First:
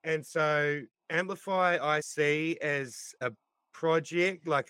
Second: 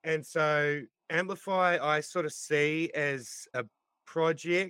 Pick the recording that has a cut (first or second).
first